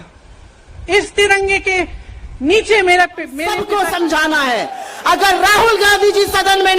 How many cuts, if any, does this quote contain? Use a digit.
1